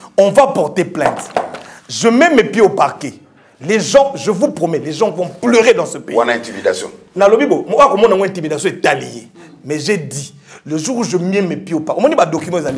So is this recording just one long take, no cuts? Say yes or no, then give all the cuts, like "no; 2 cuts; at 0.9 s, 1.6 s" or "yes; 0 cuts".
yes; 0 cuts